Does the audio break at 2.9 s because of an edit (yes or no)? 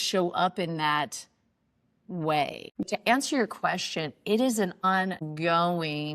yes